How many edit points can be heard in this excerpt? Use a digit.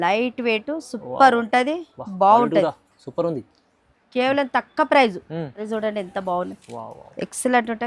1